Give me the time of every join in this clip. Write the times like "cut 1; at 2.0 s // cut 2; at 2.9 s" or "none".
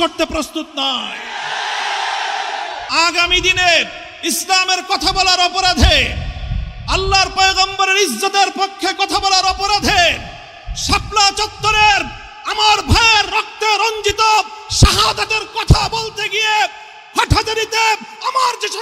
cut 1; at 2.8 s